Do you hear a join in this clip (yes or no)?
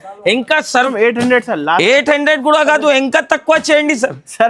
yes